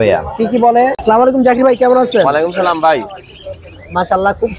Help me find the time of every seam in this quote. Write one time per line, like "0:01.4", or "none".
0:01.0